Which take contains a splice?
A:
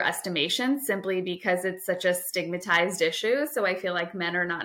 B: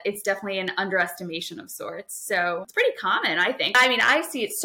B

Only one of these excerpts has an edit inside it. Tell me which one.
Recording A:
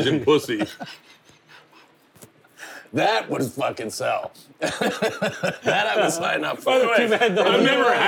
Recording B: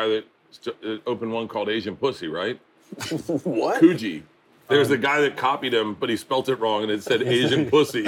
B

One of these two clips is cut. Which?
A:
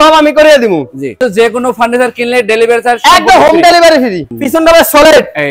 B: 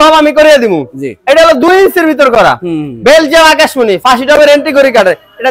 A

